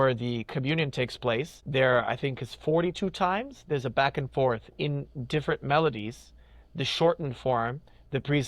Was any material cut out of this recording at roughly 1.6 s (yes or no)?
yes